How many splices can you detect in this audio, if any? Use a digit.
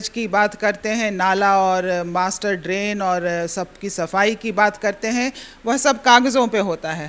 0